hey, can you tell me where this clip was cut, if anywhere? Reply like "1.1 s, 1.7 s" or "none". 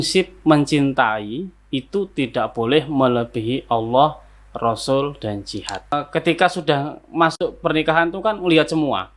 5.9 s